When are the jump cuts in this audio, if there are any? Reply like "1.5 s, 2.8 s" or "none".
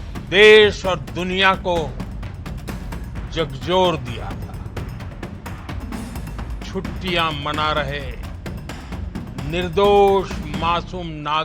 4.6 s, 6.7 s